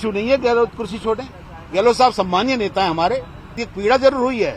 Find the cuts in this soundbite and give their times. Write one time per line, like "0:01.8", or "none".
0:03.7